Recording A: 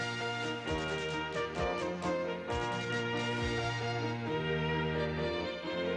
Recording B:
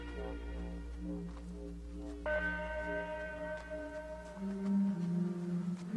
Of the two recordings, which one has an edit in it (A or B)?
A